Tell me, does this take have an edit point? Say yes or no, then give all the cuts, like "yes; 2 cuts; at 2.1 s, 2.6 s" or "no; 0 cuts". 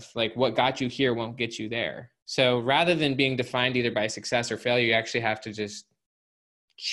no; 0 cuts